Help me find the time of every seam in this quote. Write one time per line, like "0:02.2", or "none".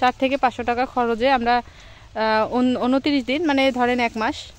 none

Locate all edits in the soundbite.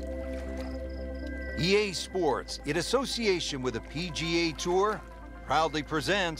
0:01.6

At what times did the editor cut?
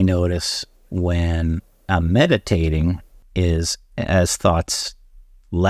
0:03.1

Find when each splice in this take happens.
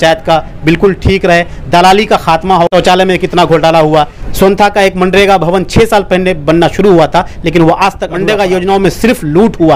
0:02.7
0:04.2
0:08.1

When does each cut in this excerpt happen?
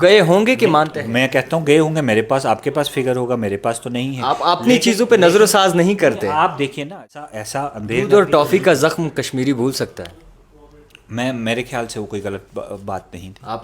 0:07.3

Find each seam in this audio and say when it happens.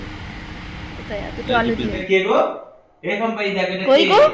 0:02.0

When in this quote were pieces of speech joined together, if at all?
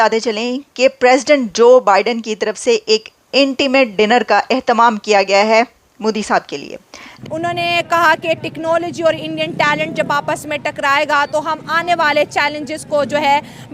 0:07.1

